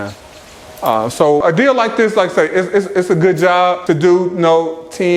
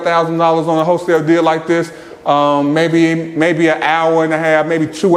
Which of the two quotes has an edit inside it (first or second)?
first